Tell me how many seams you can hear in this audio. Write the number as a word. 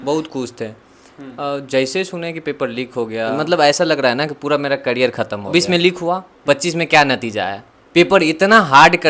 two